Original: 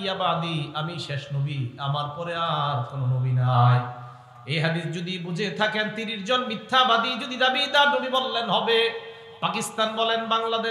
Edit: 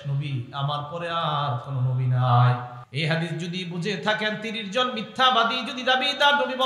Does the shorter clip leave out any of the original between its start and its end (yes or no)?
yes